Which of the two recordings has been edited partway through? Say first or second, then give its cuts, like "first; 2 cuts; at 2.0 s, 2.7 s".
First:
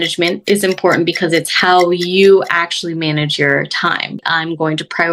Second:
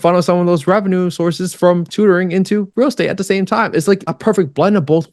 first; 1 cut; at 4.2 s